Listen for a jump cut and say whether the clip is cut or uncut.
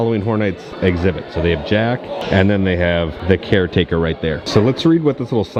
uncut